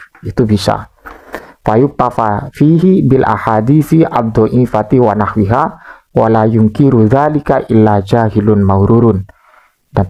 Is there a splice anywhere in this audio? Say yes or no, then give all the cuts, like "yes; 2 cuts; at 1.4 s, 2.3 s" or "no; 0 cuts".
no; 0 cuts